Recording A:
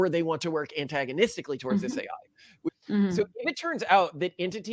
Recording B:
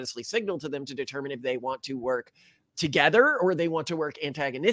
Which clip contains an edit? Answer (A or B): A